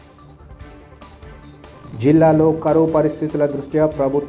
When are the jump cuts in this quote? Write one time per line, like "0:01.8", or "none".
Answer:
none